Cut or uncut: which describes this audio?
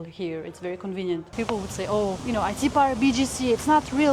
cut